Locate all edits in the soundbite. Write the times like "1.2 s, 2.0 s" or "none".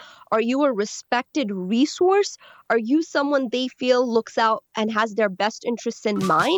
none